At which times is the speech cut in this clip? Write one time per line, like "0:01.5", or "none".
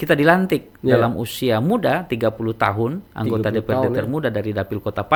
none